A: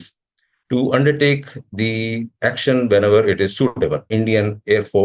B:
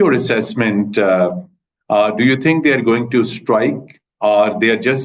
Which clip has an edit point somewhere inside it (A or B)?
A